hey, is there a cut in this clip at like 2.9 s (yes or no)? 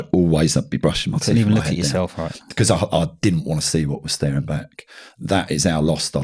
yes